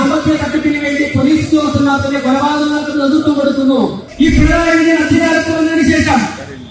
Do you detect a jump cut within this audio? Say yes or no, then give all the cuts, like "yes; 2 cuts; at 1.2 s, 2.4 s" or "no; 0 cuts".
yes; 1 cut; at 4.0 s